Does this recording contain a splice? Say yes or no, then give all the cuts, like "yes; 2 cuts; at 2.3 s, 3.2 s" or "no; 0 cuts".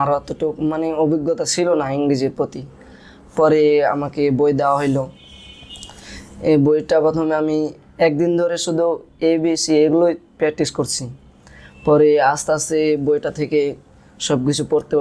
no; 0 cuts